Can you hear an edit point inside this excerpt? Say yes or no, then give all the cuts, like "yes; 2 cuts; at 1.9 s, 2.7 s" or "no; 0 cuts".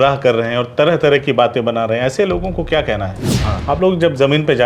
yes; 1 cut; at 3.5 s